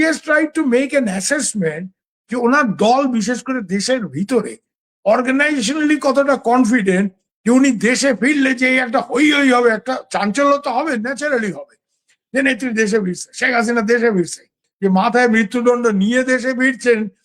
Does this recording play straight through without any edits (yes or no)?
no